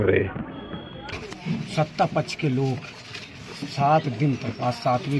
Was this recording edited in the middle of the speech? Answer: yes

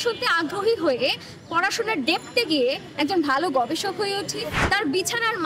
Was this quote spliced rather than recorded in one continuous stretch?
yes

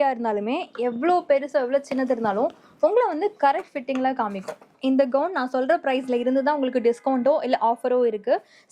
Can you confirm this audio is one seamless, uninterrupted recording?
no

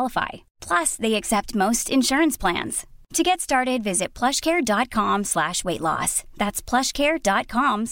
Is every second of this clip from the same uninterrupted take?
yes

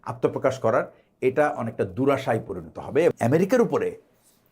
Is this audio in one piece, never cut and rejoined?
no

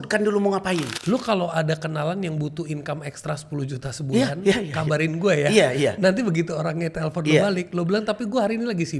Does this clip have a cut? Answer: yes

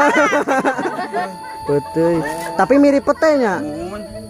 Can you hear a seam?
yes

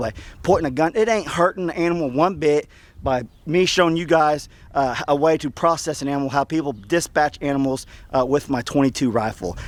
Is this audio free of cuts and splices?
yes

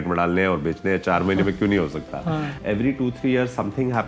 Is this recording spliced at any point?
yes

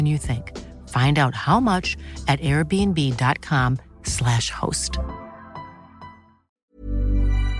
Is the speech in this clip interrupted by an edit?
yes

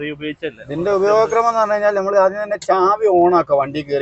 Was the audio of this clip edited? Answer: no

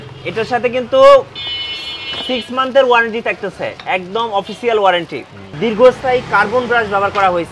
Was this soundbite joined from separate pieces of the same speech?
yes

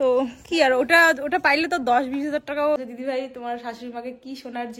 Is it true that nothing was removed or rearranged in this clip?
no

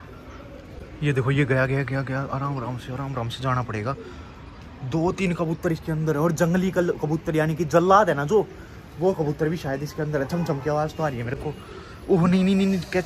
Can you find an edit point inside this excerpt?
no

